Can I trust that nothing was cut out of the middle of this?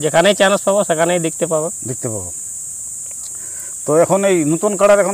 yes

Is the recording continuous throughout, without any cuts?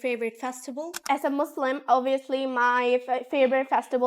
no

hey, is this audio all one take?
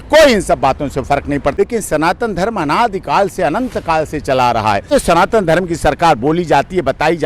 no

